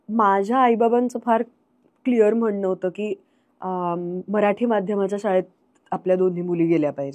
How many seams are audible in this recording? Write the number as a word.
zero